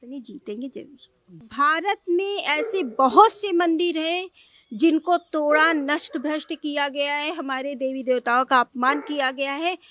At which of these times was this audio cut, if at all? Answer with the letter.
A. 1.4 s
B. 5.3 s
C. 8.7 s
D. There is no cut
A